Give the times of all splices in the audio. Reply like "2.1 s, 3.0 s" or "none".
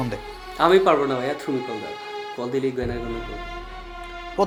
none